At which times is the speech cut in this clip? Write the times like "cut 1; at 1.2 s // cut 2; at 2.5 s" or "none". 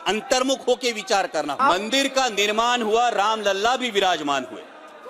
cut 1; at 1.6 s